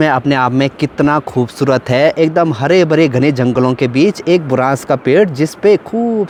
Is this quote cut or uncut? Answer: uncut